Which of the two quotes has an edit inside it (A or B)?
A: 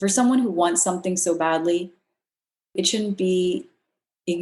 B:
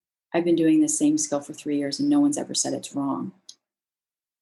A